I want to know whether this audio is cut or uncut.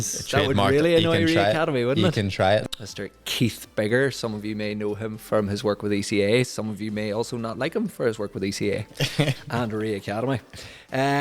cut